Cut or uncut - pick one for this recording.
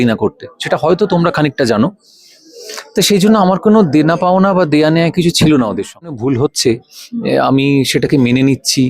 cut